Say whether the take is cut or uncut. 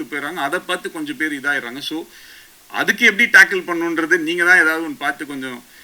uncut